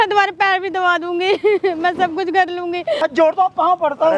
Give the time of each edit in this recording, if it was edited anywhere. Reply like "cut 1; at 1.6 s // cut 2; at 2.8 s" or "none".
cut 1; at 3.0 s